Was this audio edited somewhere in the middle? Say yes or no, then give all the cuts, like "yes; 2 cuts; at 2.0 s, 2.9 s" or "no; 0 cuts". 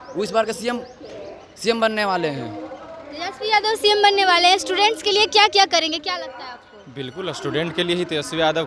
no; 0 cuts